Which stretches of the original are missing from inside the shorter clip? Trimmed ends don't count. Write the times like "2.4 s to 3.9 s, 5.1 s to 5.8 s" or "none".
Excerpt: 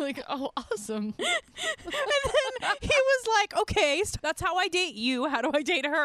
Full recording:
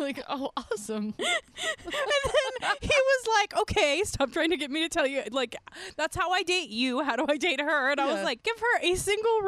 4.1 s to 5.9 s